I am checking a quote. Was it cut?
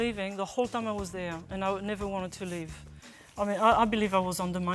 yes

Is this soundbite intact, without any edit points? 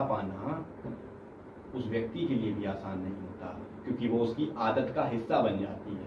yes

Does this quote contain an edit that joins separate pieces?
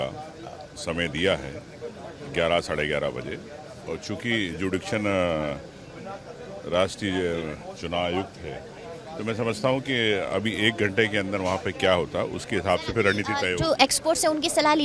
no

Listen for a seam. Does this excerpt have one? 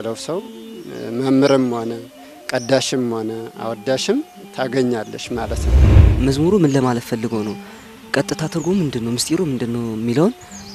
yes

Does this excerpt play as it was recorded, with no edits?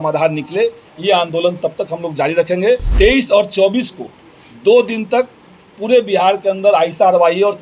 no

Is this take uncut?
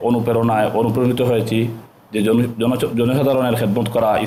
yes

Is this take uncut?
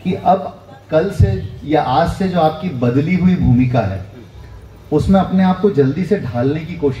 yes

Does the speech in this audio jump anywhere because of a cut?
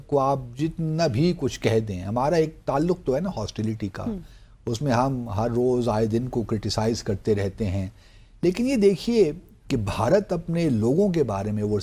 no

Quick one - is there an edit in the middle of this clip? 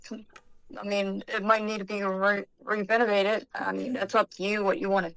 no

